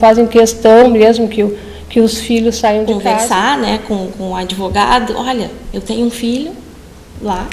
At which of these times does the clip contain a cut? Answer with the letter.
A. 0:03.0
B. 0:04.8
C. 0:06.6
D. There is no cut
A